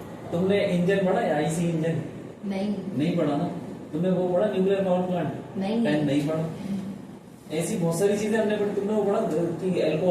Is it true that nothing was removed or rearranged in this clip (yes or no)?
yes